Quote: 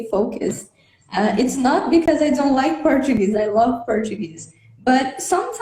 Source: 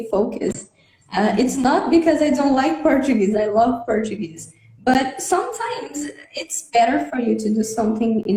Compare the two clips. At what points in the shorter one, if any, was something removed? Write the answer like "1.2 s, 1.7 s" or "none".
none